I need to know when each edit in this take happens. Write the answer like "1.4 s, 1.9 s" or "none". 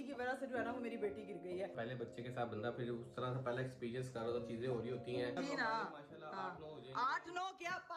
1.7 s, 5.3 s